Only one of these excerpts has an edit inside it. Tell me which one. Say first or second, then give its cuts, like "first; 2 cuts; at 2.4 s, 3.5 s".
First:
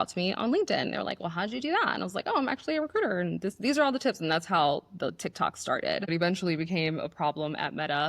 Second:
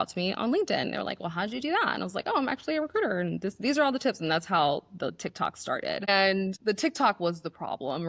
first; 1 cut; at 6.1 s